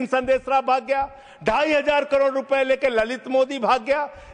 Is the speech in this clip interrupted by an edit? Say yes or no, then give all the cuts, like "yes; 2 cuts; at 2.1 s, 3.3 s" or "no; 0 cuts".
no; 0 cuts